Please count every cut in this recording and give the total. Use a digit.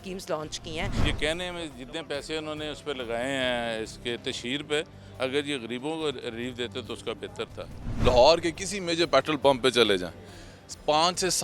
2